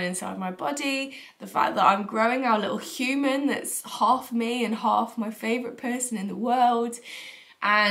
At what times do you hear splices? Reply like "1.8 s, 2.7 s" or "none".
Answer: none